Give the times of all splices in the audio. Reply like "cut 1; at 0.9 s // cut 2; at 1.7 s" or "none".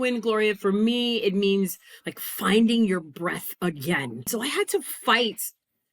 cut 1; at 4.3 s